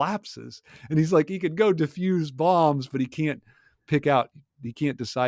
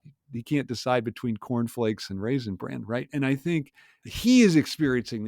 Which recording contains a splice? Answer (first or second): second